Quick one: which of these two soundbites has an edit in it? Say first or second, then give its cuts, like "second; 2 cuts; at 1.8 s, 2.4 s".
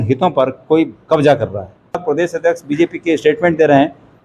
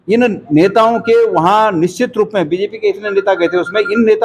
first; 1 cut; at 2.0 s